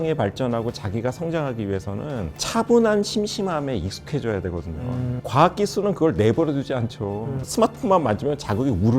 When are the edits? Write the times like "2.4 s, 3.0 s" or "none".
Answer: 5.2 s, 7.4 s